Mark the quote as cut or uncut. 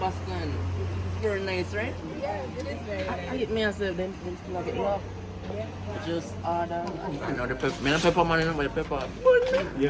cut